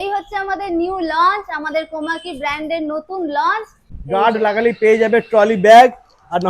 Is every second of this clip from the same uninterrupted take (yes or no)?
no